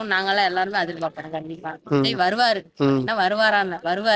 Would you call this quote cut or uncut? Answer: uncut